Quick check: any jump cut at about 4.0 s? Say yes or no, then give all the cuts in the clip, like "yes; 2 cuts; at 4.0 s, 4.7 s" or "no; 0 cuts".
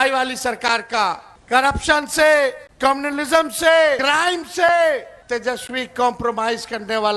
yes; 4 cuts; at 1.3 s, 2.7 s, 4.0 s, 5.1 s